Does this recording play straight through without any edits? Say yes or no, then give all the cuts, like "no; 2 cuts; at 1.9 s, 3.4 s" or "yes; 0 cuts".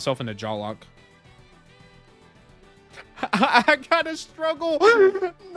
yes; 0 cuts